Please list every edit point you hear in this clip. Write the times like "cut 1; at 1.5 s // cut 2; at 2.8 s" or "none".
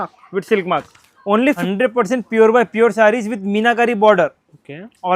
cut 1; at 1.6 s